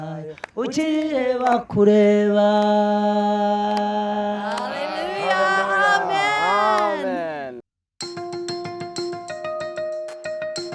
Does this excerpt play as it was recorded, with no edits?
no; 1 cut; at 7.7 s

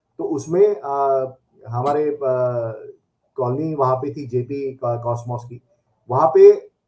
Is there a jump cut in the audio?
no; 0 cuts

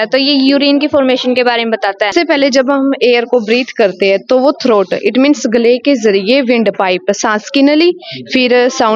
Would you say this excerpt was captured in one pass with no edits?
no; 1 cut; at 2.1 s

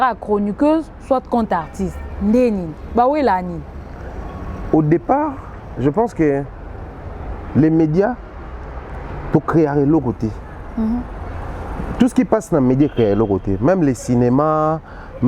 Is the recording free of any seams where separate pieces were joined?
yes; 0 cuts

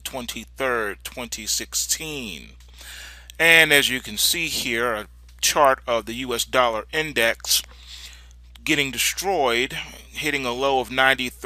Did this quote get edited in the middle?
no; 0 cuts

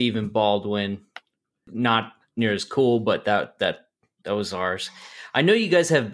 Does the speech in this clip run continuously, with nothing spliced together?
no; 1 cut; at 1.6 s

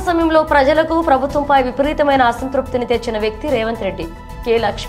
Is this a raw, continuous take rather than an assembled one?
yes; 0 cuts

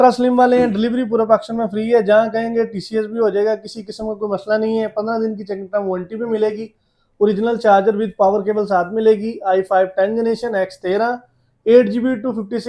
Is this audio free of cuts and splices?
yes; 0 cuts

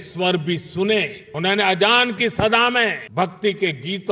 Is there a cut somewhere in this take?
yes; 1 cut; at 3.0 s

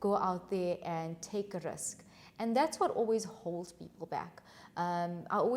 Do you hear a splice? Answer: no; 0 cuts

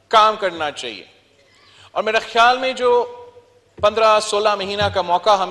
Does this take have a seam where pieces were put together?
no; 0 cuts

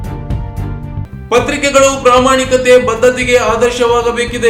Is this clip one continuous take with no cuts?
yes; 0 cuts

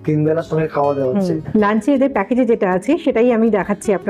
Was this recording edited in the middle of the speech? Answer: yes; 1 cut; at 1.4 s

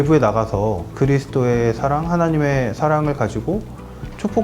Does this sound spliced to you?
yes; 1 cut; at 0.9 s

